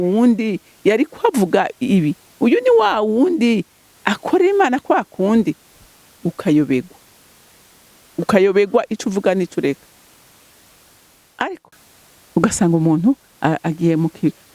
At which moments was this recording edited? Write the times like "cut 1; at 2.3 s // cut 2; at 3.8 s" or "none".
cut 1; at 11.6 s